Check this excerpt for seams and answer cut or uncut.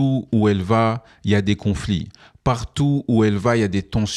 uncut